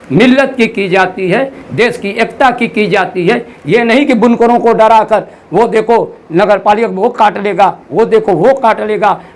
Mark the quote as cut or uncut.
uncut